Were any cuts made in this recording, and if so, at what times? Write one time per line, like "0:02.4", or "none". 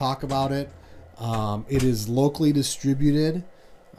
none